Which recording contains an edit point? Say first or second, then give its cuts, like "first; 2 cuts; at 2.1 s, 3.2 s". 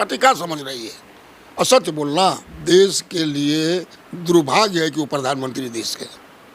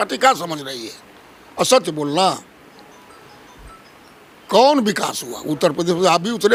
first; 1 cut; at 2.5 s